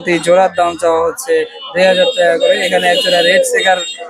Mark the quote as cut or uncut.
uncut